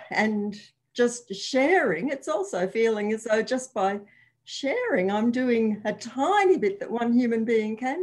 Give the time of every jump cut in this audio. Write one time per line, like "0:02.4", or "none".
none